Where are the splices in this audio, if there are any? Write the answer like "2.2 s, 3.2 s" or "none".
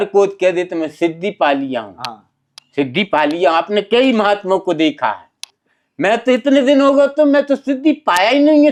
none